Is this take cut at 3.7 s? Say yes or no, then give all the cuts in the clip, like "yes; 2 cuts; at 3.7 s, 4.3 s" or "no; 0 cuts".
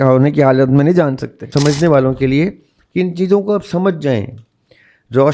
no; 1 cut; at 1.4 s